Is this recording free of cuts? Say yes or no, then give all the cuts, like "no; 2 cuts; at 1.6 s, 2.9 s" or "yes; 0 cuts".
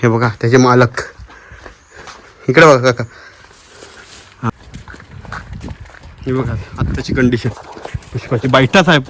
no; 1 cut; at 4.5 s